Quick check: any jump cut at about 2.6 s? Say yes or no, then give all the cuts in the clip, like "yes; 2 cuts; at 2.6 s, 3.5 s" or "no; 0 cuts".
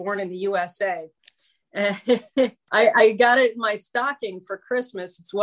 yes; 1 cut; at 2.6 s